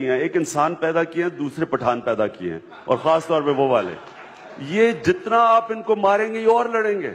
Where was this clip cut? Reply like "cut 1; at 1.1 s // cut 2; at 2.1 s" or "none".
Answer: none